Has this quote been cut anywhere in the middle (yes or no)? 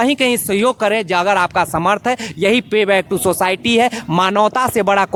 no